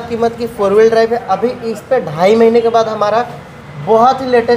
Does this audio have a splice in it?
no; 0 cuts

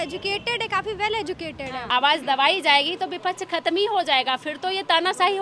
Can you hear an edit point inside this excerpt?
yes; 1 cut; at 1.9 s

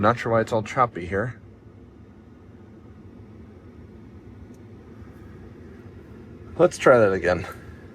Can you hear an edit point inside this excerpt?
no; 0 cuts

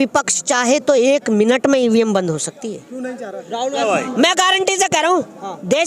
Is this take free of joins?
no; 1 cut; at 3.8 s

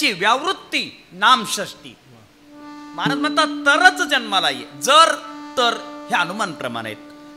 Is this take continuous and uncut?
yes; 0 cuts

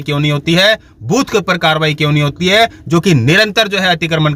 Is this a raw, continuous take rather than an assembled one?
yes; 0 cuts

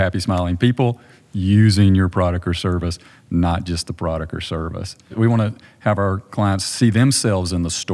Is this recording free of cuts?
no; 1 cut; at 5.1 s

